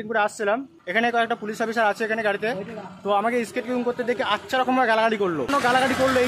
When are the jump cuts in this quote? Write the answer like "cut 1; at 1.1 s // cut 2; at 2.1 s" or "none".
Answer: cut 1; at 0.9 s // cut 2; at 5.5 s